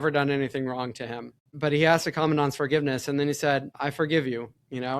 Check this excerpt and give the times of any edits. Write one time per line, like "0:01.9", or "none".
0:01.6
0:03.7